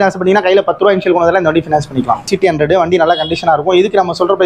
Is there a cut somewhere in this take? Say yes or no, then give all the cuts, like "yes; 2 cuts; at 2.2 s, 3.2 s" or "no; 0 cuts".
yes; 1 cut; at 2.3 s